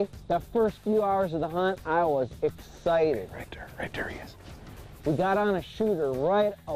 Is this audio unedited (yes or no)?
yes